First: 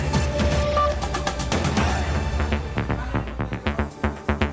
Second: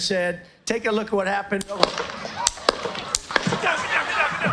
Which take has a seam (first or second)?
first